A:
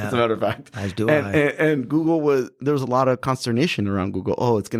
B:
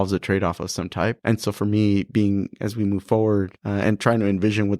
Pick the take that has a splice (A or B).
B